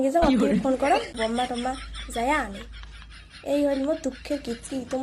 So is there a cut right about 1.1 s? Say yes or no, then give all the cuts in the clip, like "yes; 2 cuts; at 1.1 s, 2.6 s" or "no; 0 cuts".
yes; 1 cut; at 1.1 s